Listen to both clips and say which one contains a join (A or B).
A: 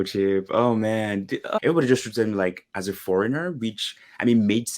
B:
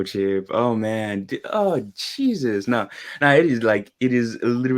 A